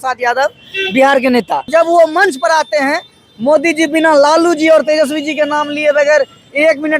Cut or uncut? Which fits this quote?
cut